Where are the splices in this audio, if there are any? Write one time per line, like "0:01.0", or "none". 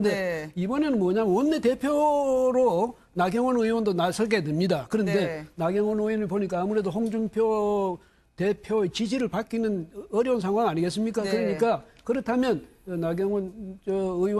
none